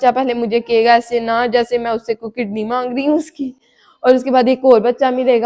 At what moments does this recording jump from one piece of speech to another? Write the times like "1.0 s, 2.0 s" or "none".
none